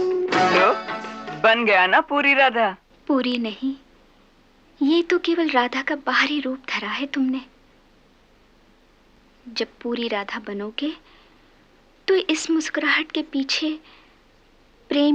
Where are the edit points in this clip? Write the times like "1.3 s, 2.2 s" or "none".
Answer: 2.9 s